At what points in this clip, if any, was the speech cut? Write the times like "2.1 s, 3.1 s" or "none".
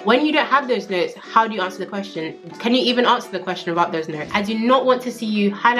4.2 s